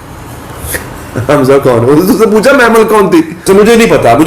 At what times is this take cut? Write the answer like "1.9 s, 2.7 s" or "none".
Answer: 3.4 s